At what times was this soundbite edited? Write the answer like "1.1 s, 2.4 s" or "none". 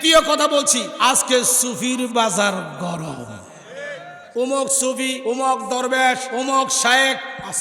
0.9 s, 4.2 s, 5.2 s, 6.3 s